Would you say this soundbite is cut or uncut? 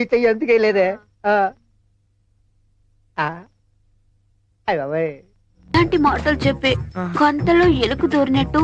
cut